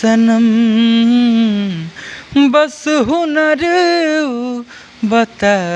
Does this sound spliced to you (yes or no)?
no